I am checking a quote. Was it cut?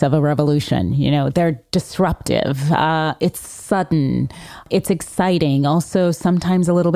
yes; 1 cut; at 4.7 s

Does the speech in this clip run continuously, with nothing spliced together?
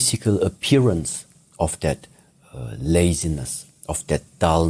yes; 0 cuts

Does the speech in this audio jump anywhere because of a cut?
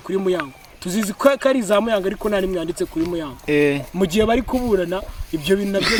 no; 0 cuts

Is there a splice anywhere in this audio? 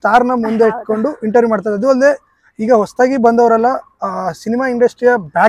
no; 0 cuts

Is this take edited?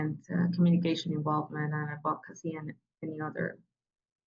no; 0 cuts

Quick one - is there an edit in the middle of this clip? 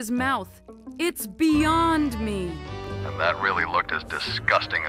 no; 0 cuts

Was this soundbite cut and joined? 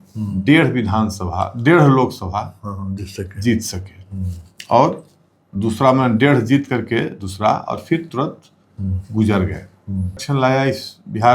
yes; 1 cut; at 10.2 s

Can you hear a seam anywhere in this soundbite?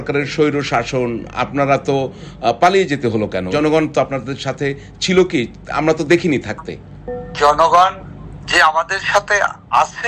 yes; 1 cut; at 3.5 s

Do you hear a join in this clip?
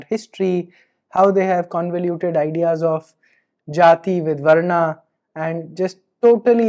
no; 0 cuts

